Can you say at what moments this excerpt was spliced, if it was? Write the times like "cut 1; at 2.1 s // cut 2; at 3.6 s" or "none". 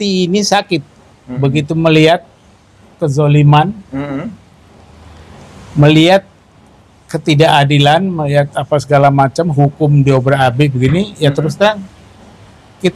none